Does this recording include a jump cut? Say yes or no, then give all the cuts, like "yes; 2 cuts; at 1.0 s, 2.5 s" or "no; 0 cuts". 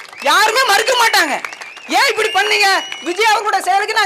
no; 0 cuts